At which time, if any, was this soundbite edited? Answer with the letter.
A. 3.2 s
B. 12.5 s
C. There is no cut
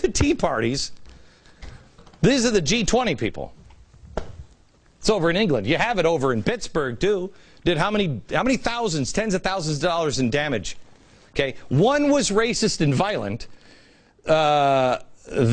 B